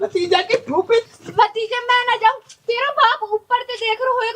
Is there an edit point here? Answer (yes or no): yes